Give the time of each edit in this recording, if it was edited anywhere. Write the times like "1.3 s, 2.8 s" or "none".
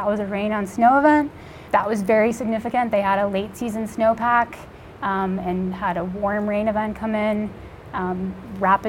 none